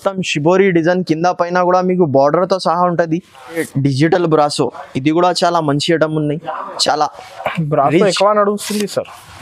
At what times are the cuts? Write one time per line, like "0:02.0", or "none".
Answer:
0:03.6